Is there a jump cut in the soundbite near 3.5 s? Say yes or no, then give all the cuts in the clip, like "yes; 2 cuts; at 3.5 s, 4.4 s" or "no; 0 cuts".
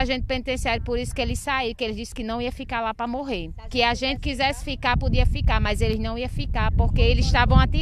yes; 1 cut; at 3.5 s